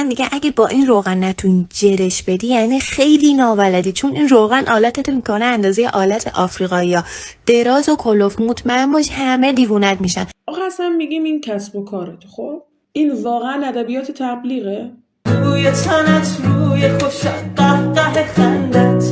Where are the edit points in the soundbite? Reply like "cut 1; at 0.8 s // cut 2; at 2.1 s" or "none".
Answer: none

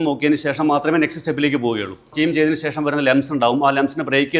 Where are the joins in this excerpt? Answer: cut 1; at 2.1 s

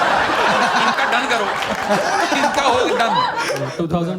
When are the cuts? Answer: none

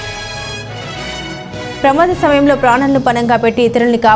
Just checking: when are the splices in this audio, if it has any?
cut 1; at 1.0 s

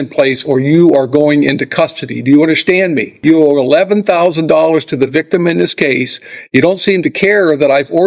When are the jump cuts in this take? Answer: cut 1; at 3.1 s

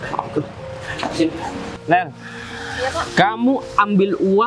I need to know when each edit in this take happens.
cut 1; at 1.8 s

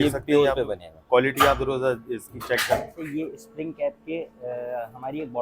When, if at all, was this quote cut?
cut 1; at 3.0 s

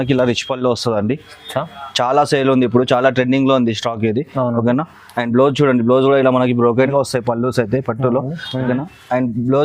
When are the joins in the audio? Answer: cut 1; at 6.9 s

